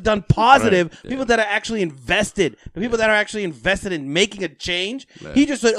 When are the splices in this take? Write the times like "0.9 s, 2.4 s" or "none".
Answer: 1.0 s